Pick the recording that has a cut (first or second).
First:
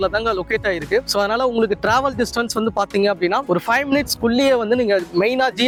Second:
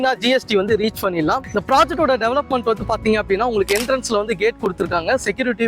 second